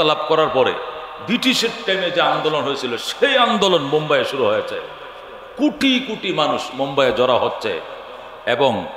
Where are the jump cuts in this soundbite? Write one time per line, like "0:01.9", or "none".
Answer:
none